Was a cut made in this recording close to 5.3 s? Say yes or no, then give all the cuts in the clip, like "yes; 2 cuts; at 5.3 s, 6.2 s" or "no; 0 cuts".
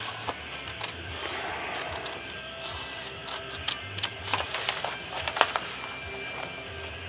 no; 0 cuts